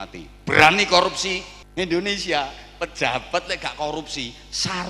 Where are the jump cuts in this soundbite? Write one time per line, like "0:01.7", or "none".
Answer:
0:01.6

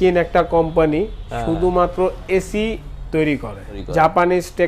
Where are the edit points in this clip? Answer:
0:03.8

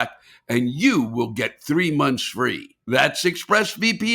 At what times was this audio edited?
0:02.7

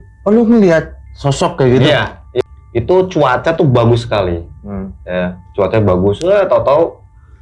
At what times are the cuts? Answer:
0:02.4

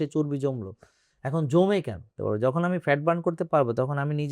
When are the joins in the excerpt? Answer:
0:02.2

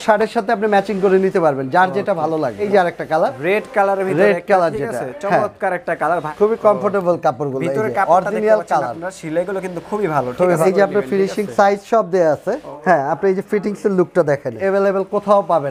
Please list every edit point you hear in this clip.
0:02.6
0:06.3
0:10.6
0:12.7
0:14.6

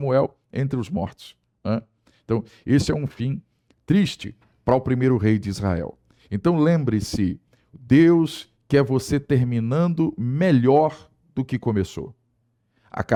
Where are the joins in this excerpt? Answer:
none

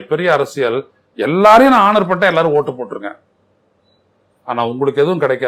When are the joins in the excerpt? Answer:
none

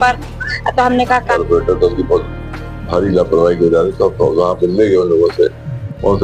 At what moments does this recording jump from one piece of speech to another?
0:01.3

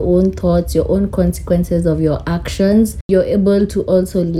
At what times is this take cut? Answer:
0:03.0

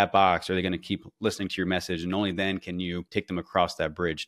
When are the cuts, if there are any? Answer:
0:03.0

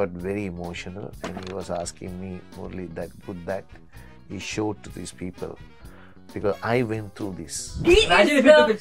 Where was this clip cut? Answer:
0:07.7

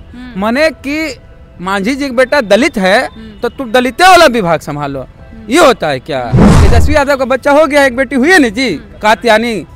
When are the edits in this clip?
0:06.5

